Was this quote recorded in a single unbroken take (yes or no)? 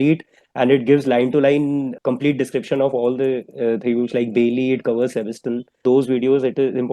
no